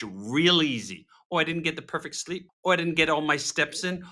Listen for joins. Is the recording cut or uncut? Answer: cut